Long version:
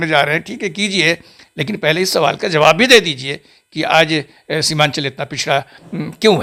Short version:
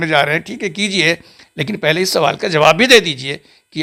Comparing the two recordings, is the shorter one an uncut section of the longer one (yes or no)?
yes